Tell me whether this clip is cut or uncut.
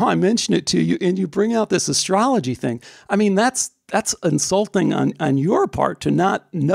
uncut